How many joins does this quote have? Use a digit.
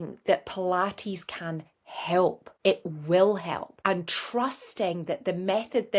2